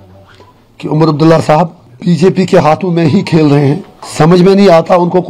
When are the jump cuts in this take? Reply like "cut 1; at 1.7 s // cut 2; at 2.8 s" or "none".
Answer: cut 1; at 1.9 s // cut 2; at 4.0 s